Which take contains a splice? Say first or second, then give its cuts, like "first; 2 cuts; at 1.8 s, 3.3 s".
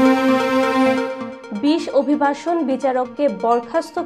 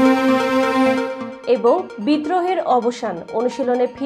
second; 1 cut; at 1.2 s